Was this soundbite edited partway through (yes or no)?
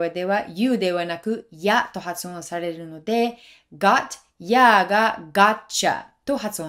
no